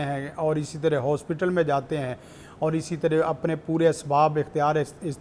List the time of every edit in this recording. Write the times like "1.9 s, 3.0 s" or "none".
none